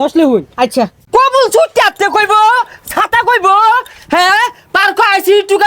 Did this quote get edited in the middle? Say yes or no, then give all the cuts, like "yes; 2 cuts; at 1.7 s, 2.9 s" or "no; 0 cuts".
yes; 1 cut; at 1.0 s